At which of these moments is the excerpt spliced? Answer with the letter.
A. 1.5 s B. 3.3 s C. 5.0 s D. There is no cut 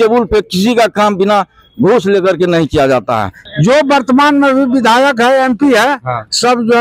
B